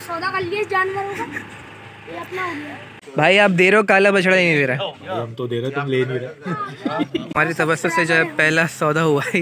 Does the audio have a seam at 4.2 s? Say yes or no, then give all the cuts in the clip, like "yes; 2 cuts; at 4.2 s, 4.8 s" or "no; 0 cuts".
no; 2 cuts; at 3.0 s, 7.3 s